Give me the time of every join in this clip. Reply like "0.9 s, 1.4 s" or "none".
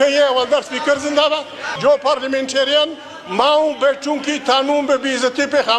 1.7 s